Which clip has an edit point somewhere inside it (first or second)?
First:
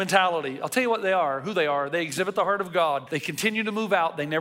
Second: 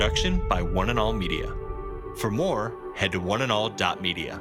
first